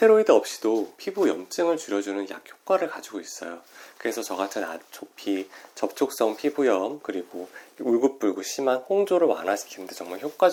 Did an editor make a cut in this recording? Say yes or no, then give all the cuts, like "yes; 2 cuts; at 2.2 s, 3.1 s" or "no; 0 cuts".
no; 0 cuts